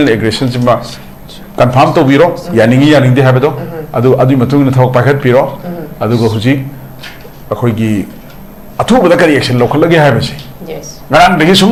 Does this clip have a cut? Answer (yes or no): no